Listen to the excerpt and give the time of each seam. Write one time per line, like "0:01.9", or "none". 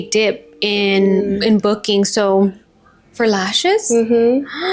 0:02.6